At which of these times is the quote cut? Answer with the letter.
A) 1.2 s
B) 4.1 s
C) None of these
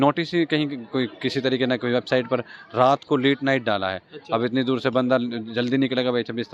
C